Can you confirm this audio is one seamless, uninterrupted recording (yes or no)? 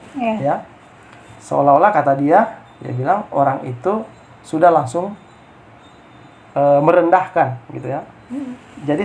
yes